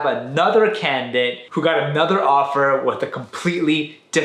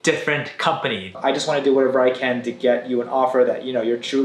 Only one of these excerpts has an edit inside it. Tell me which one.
second; 1 cut; at 1.1 s

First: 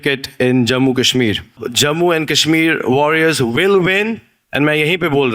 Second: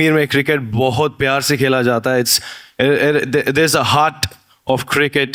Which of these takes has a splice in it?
first; 1 cut; at 1.6 s

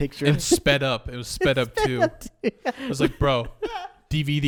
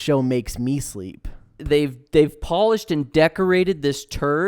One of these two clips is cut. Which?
second; 1 cut; at 1.6 s

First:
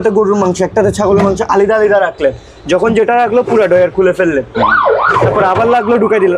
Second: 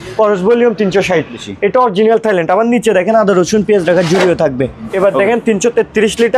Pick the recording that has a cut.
second; 2 cuts; at 1.5 s, 4.8 s

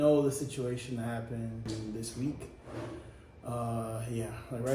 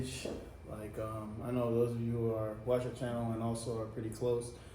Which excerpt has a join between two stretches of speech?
first; 1 cut; at 1.7 s

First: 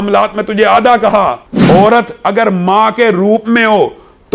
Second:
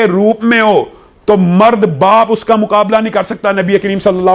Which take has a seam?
first; 1 cut; at 1.5 s

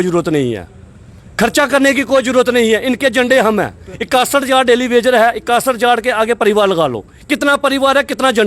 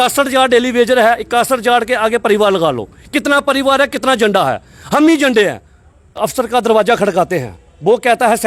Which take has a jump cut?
second; 1 cut; at 6.3 s

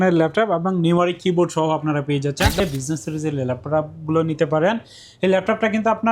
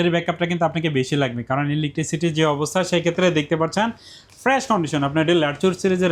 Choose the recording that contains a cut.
first; 1 cut; at 2.6 s

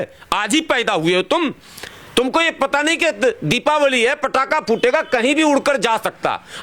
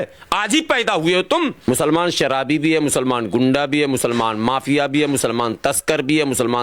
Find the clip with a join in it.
second; 1 cut; at 1.6 s

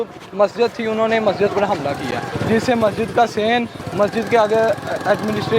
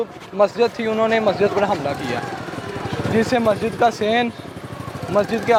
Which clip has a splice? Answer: first; 2 cuts; at 2.3 s, 3.8 s

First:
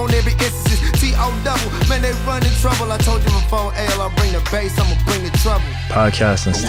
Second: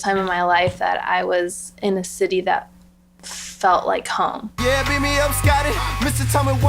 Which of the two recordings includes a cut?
second; 1 cut; at 4.5 s

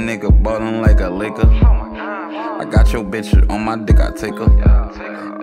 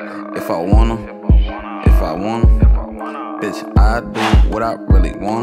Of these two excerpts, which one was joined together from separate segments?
second; 1 cut; at 3.8 s

